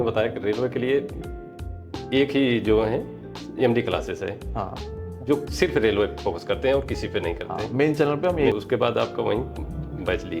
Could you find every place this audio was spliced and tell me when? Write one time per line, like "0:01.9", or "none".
0:08.5

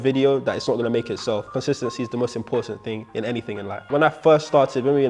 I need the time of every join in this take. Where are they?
0:01.5
0:03.8

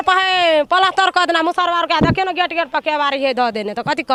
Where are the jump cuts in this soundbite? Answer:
none

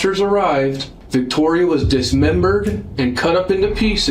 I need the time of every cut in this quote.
0:00.9

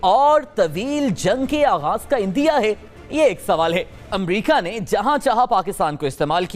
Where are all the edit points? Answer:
0:04.1

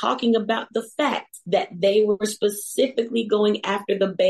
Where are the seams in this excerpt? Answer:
0:01.3

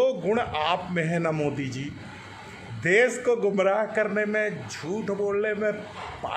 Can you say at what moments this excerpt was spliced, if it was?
0:01.1

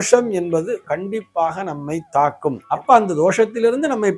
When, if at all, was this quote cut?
0:02.6

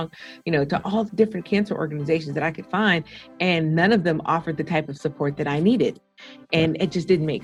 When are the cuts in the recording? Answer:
none

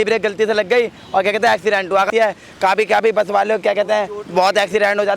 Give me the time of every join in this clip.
0:02.1

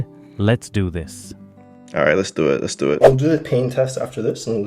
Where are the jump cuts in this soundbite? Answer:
0:03.0

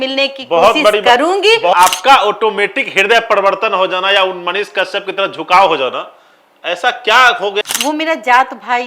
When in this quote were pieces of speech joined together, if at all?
0:01.7
0:07.6

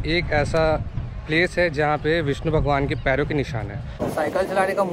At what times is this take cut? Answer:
0:04.0

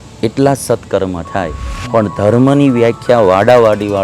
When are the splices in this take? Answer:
0:01.7

